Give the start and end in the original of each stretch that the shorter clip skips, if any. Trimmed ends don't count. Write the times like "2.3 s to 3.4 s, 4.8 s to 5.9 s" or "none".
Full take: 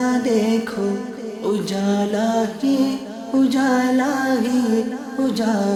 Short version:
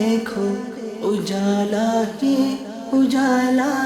none